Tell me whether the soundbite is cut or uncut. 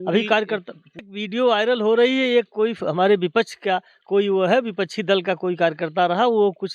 cut